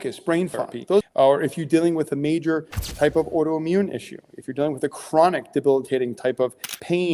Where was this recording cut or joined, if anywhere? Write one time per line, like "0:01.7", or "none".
0:01.1

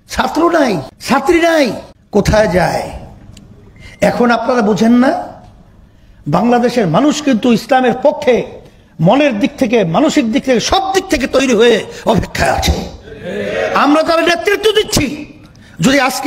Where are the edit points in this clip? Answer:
0:00.9
0:01.9

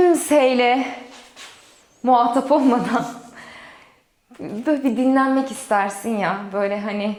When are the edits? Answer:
none

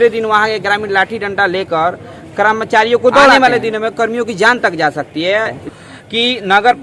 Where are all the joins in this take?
0:03.4
0:05.6

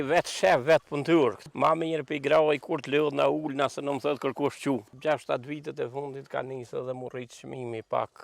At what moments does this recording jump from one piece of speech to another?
0:01.5
0:04.9

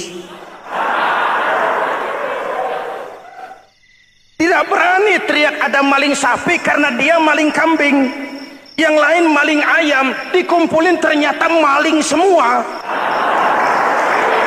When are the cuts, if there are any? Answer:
0:12.8

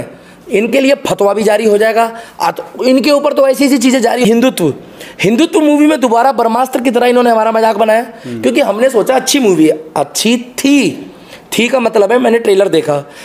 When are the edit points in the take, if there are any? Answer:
0:04.2

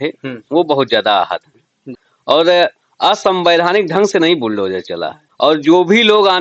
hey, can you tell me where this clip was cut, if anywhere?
0:01.8
0:05.2

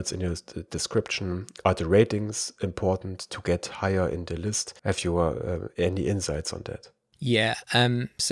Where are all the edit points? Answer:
0:04.7

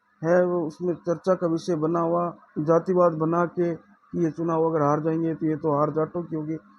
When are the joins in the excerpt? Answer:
0:02.4

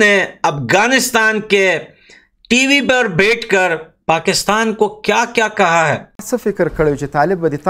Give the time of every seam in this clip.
0:06.2

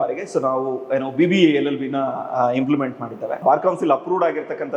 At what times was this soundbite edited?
0:03.4

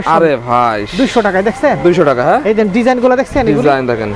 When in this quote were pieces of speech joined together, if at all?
none

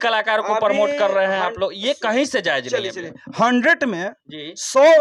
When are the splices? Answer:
none

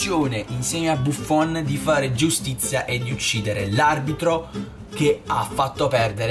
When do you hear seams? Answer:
none

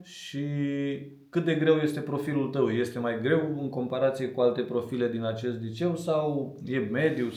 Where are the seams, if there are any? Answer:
none

